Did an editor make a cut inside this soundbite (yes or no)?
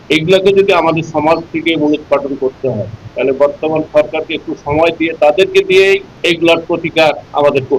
no